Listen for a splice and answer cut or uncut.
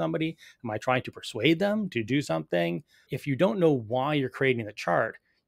cut